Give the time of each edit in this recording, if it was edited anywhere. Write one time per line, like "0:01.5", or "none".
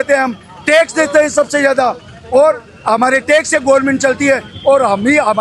none